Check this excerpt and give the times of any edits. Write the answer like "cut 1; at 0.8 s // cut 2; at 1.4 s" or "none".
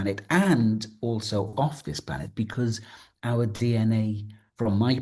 none